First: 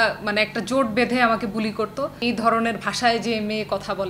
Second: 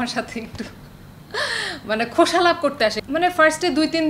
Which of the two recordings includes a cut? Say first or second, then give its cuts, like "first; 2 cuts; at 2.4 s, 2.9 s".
first; 1 cut; at 2.2 s